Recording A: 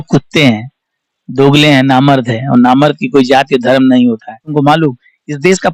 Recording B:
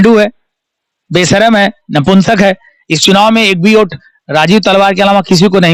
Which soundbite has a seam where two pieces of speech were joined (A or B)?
A